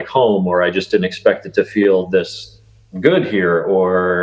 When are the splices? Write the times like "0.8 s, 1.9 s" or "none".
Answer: none

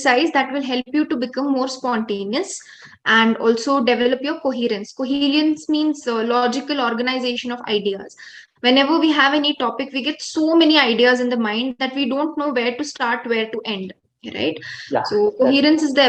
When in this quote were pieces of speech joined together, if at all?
none

